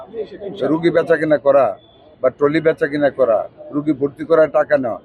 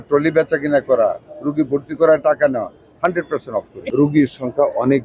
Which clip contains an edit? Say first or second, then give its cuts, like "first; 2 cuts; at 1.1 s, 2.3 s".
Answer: second; 1 cut; at 3.8 s